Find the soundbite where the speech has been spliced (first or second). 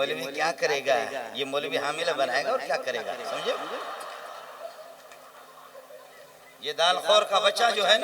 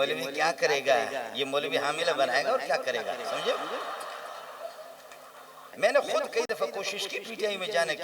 second